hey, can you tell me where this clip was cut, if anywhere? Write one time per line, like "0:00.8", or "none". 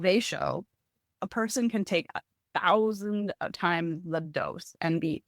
0:01.2